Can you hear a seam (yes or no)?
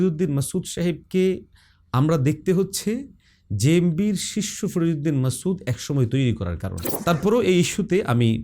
yes